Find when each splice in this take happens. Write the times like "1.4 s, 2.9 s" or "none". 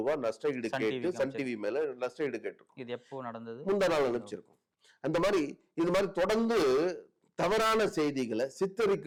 none